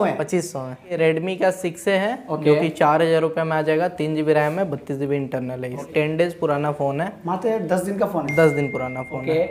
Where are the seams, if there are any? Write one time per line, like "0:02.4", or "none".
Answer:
0:00.9
0:05.9

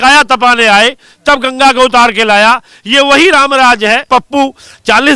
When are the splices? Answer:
0:04.1

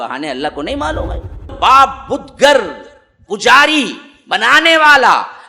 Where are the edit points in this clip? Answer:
0:01.5

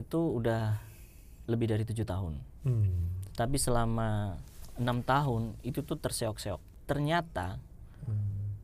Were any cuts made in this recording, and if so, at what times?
0:06.8

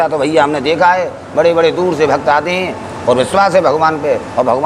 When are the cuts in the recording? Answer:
none

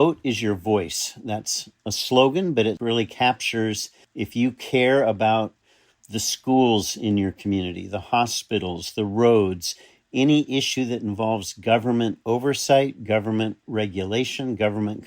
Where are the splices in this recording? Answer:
0:13.6

